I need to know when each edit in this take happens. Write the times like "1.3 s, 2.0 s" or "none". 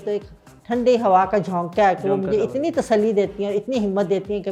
none